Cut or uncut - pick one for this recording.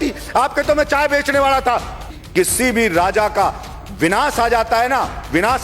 cut